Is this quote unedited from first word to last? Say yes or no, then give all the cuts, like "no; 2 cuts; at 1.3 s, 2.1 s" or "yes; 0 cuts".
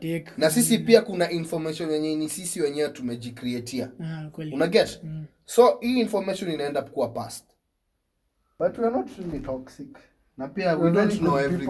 no; 1 cut; at 8.5 s